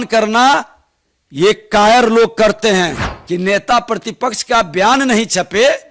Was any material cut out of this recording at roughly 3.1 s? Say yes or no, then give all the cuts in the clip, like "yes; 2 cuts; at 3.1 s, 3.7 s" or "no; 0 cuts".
yes; 1 cut; at 3.1 s